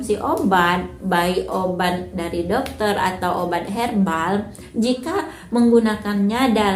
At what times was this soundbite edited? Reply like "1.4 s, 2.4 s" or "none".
none